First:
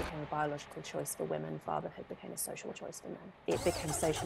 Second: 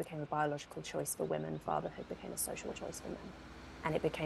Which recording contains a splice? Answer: first; 1 cut; at 3.3 s

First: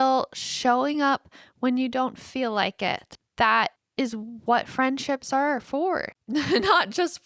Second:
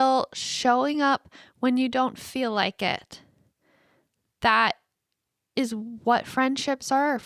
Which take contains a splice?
first; 3 cuts; at 3.2 s, 3.8 s, 6.1 s

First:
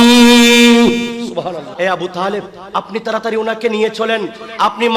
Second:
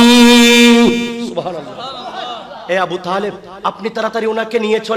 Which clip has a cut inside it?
first; 1 cut; at 1.7 s

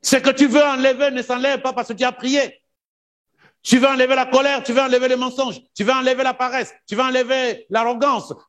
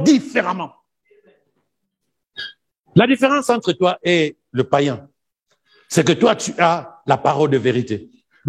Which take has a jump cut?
second; 1 cut; at 1.2 s

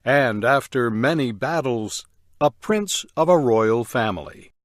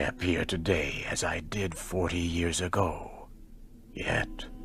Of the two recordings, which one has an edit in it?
second; 1 cut; at 2.6 s

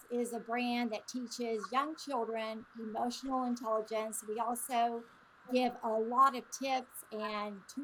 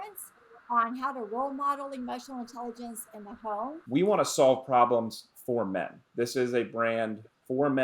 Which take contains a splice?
second; 1 cut; at 3.8 s

